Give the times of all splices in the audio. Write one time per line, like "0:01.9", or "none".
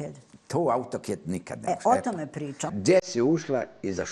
0:02.7